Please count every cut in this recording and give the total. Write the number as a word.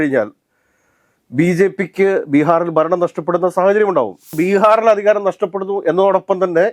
one